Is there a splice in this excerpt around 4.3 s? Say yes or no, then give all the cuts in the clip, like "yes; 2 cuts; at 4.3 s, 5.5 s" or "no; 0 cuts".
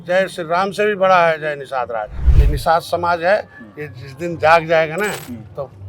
no; 1 cut; at 2.1 s